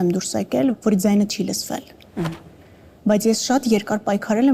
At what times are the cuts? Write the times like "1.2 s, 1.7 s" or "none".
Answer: none